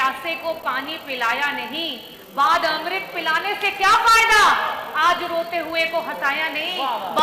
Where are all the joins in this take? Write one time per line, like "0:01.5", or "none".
none